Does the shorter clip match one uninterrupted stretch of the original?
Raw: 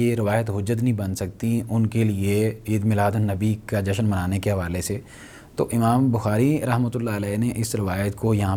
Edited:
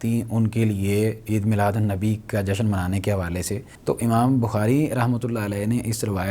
no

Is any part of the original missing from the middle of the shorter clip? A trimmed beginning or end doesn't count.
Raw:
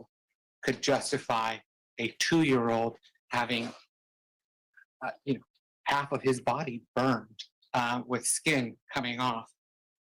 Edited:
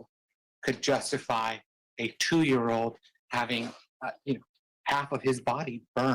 yes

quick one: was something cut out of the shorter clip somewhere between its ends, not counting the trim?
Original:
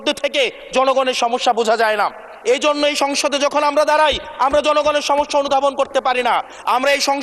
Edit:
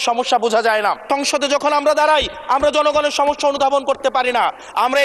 yes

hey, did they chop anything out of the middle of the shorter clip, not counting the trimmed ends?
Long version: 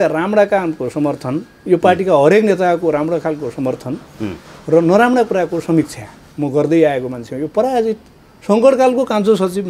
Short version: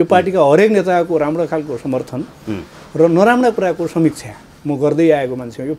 no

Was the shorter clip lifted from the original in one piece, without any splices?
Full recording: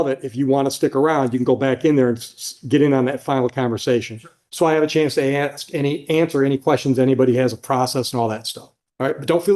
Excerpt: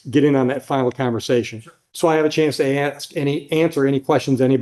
yes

